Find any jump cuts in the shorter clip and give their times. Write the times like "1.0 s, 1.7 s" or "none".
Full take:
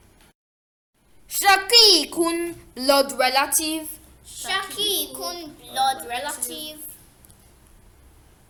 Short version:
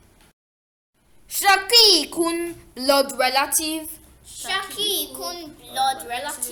none